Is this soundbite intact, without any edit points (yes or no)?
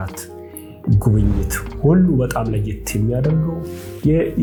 yes